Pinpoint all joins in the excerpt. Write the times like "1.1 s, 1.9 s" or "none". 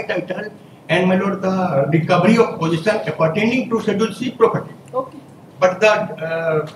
none